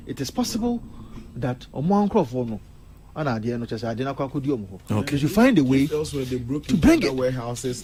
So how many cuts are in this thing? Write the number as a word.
zero